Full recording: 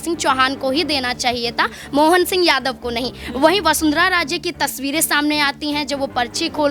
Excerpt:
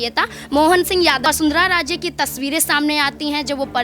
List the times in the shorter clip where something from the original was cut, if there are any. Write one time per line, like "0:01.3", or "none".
0:01.2